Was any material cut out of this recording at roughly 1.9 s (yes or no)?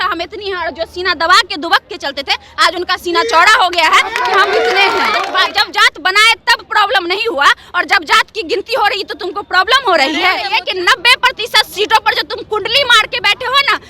no